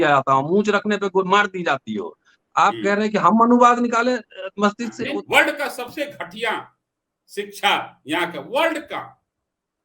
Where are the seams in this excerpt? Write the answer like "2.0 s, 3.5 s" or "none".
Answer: 5.0 s

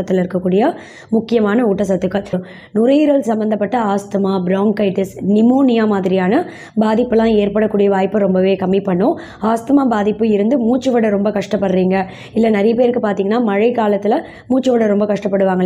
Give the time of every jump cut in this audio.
2.4 s

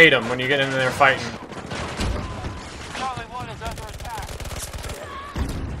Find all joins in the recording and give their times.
none

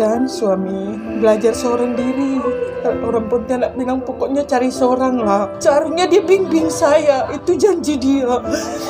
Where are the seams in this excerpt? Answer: 1.0 s, 5.5 s

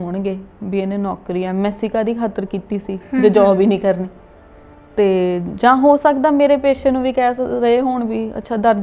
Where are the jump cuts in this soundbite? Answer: none

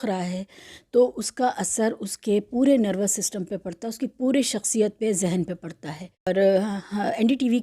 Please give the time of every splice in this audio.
6.3 s

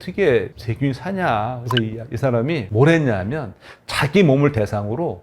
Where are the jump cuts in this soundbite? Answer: 1.6 s

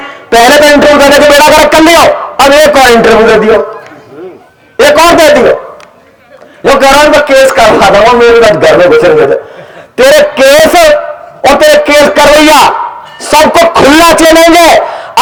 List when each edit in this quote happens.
none

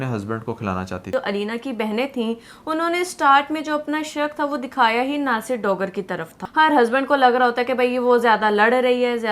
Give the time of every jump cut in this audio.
1.0 s, 6.3 s

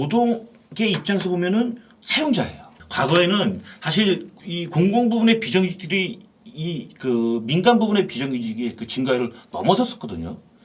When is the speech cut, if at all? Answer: 2.8 s

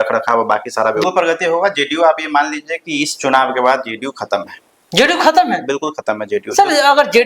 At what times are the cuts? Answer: 1.1 s

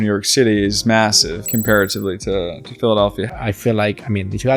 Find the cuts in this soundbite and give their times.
1.3 s, 3.3 s

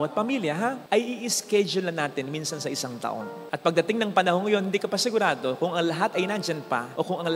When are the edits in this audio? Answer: none

